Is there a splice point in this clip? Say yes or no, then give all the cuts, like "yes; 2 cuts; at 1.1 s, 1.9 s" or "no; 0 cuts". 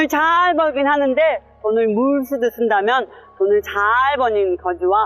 no; 0 cuts